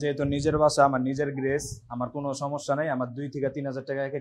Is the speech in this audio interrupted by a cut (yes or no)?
no